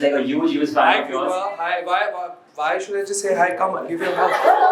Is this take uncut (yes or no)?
yes